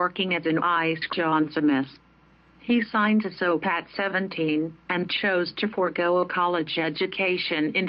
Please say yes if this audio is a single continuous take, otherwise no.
yes